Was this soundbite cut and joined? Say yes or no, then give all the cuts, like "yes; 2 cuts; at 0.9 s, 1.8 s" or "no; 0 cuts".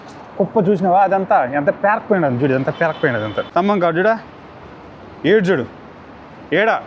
yes; 1 cut; at 3.5 s